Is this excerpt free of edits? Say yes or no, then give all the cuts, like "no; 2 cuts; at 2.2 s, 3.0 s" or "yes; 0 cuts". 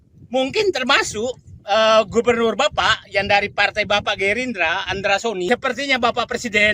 no; 1 cut; at 5.5 s